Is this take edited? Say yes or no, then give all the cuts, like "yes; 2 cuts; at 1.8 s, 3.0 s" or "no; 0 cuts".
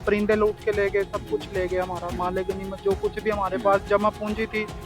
no; 0 cuts